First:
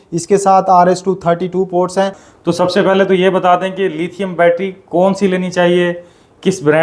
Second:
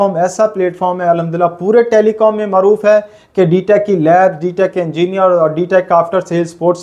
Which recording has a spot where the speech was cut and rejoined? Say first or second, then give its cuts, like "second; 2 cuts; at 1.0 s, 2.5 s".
first; 1 cut; at 2.2 s